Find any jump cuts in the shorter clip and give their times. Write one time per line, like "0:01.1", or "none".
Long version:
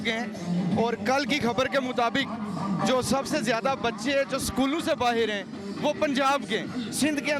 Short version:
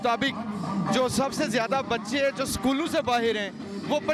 none